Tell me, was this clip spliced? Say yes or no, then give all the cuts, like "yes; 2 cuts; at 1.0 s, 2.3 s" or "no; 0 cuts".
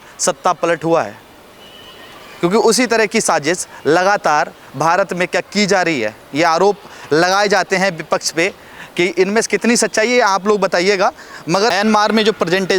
no; 0 cuts